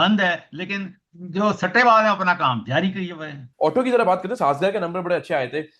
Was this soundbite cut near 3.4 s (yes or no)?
yes